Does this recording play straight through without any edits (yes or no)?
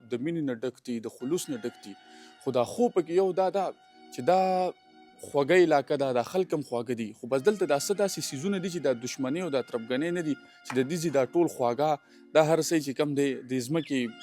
yes